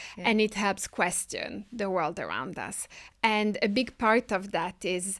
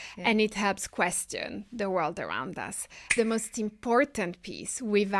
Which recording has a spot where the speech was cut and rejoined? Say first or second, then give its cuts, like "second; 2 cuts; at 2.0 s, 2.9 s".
second; 1 cut; at 3.2 s